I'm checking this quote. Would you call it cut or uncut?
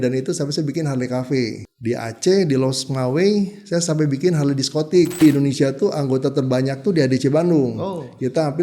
cut